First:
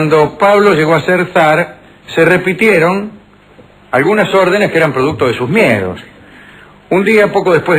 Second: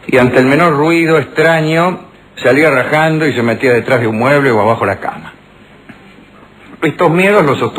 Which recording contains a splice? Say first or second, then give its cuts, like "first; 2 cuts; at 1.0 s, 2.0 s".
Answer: second; 1 cut; at 6.5 s